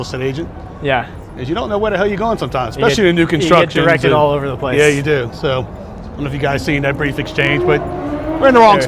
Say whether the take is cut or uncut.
uncut